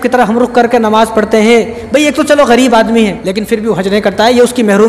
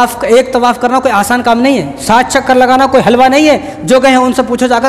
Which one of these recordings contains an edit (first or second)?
first